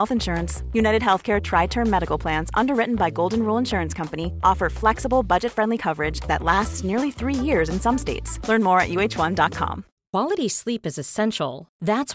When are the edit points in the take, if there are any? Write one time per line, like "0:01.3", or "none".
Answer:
0:09.8